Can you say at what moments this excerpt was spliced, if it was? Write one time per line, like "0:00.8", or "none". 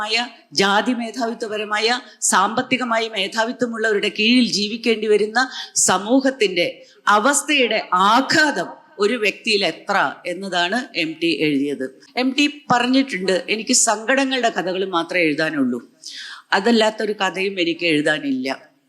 0:12.0